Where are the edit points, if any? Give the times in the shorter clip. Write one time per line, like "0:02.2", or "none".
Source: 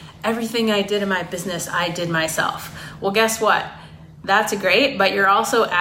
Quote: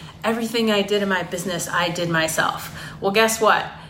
none